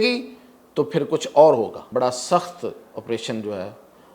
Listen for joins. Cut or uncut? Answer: cut